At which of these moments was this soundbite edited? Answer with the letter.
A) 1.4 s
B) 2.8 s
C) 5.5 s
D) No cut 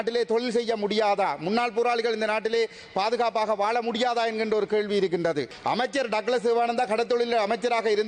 C